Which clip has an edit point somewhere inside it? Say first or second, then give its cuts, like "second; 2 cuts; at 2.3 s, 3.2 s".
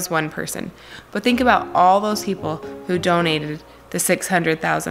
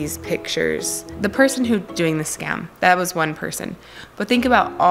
second; 2 cuts; at 1.1 s, 1.9 s